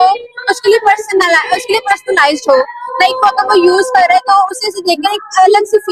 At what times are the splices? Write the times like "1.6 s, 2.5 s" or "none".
none

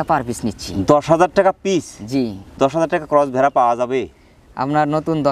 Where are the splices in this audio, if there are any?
none

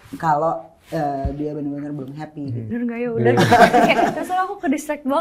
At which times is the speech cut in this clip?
2.7 s

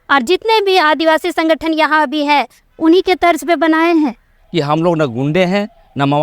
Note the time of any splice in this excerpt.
4.4 s

